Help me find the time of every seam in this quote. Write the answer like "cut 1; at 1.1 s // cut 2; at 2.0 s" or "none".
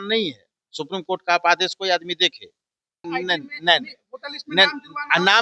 cut 1; at 3.0 s